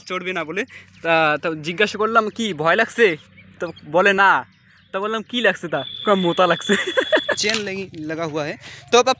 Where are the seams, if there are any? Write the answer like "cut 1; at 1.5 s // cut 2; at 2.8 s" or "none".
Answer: cut 1; at 7.4 s